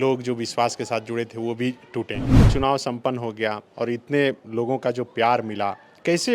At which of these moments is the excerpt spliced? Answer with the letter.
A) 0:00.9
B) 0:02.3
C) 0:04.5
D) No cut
B